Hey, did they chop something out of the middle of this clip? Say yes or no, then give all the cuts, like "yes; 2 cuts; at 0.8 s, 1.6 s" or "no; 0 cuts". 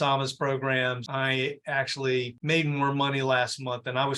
yes; 1 cut; at 1.0 s